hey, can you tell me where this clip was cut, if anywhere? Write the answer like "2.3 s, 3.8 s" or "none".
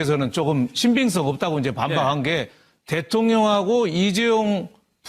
4.1 s